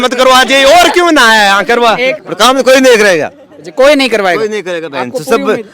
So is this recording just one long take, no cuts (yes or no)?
no